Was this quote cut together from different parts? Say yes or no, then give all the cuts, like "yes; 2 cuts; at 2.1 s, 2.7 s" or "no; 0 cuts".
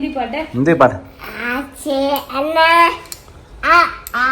no; 0 cuts